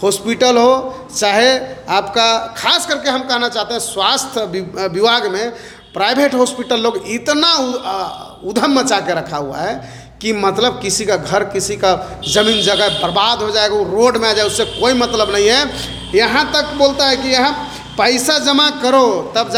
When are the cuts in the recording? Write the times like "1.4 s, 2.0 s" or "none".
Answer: none